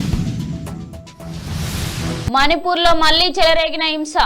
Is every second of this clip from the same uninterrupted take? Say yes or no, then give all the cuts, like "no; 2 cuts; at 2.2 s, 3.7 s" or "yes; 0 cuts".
no; 1 cut; at 2.3 s